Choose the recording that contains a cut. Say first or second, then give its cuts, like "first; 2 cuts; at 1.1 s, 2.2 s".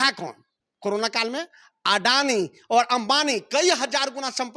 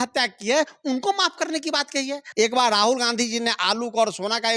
second; 1 cut; at 2.2 s